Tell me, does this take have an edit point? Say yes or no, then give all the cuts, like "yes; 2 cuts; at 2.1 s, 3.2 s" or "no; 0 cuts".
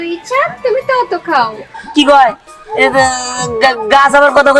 yes; 1 cut; at 1.7 s